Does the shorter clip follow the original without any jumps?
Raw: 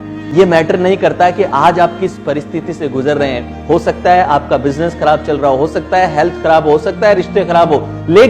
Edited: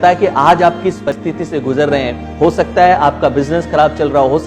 no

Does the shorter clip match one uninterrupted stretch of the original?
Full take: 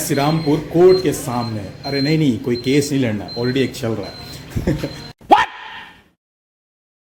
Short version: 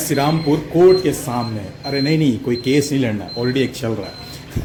yes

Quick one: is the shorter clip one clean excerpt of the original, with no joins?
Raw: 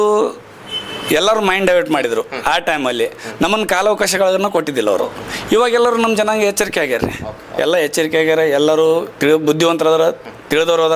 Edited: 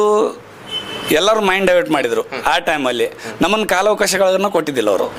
yes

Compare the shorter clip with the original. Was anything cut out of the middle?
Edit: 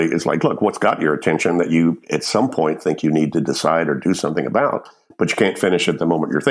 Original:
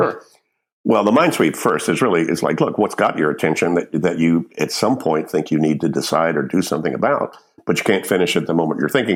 yes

